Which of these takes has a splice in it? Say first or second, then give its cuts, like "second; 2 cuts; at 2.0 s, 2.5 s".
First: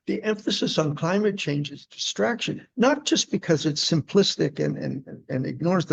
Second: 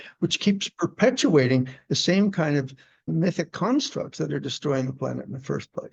second; 1 cut; at 3.1 s